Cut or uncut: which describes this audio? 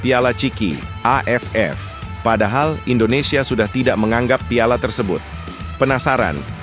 uncut